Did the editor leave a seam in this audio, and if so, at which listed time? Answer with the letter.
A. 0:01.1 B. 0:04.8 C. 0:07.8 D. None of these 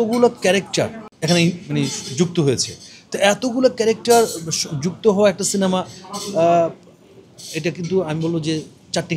A